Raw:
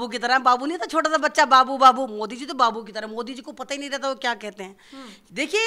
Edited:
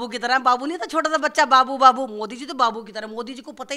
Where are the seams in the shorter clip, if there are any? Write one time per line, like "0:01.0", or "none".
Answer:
none